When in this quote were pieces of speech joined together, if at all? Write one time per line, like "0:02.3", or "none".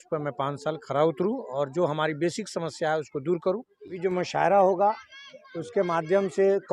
0:04.0